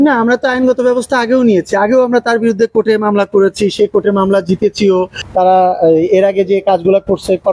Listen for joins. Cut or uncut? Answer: uncut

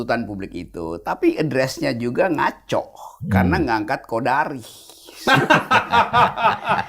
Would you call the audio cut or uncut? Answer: uncut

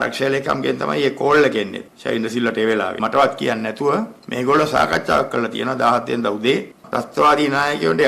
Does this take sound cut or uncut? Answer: cut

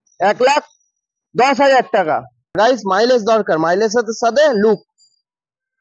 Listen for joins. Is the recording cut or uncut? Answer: cut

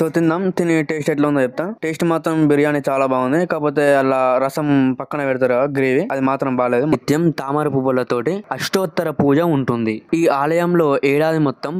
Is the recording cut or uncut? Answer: cut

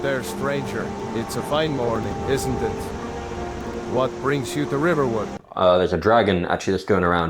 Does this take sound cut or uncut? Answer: cut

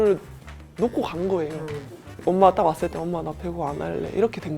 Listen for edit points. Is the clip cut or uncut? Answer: cut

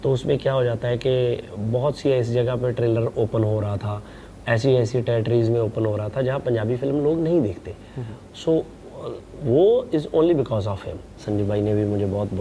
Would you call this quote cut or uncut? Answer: cut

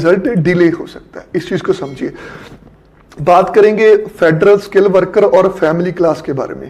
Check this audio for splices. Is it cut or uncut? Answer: uncut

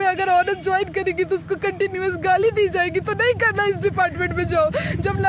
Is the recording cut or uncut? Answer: uncut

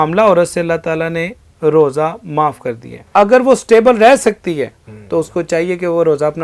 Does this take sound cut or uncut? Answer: cut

